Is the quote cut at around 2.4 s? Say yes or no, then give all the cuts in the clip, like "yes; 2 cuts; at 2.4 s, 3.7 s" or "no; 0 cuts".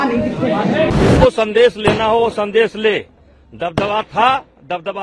no; 1 cut; at 0.9 s